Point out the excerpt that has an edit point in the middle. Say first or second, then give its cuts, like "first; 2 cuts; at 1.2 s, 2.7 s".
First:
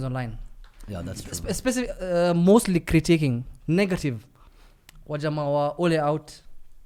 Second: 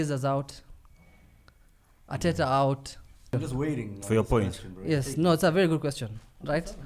second; 1 cut; at 3.3 s